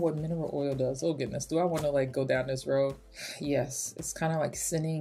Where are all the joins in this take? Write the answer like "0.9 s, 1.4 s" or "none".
none